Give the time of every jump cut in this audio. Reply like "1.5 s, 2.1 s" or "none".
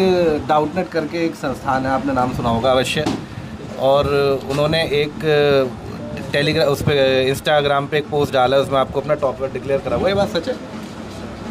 none